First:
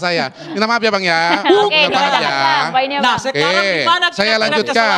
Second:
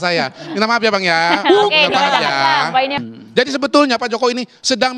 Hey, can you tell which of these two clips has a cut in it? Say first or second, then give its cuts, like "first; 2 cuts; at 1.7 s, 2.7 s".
second; 1 cut; at 3.0 s